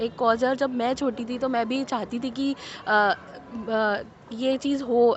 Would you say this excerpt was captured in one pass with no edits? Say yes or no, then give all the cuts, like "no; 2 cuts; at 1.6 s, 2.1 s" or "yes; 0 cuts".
yes; 0 cuts